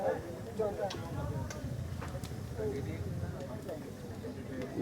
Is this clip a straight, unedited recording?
yes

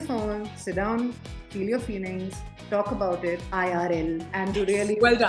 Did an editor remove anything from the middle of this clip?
yes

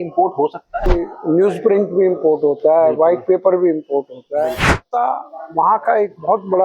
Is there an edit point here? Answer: yes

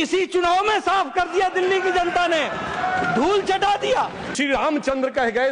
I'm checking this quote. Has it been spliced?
yes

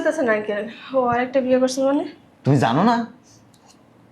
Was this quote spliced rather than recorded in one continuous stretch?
no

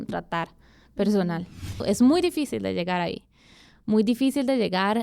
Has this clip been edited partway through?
yes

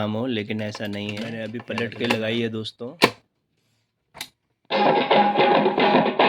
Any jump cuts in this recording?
yes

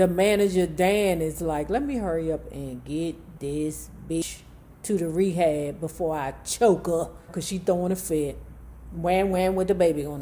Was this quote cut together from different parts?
yes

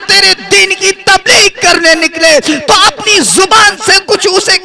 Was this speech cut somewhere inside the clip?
no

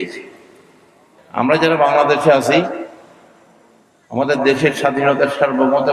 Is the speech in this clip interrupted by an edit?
yes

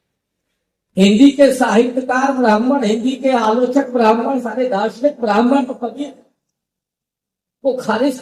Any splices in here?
no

